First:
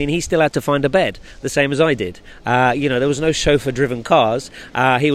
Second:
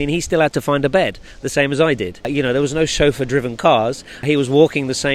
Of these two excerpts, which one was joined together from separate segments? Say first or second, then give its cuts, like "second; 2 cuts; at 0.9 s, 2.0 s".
second; 2 cuts; at 2.3 s, 4.2 s